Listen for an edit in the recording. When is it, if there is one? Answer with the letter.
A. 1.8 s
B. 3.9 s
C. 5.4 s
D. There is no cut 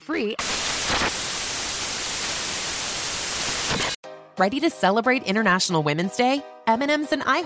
B